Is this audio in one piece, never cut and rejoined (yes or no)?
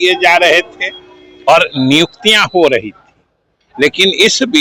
yes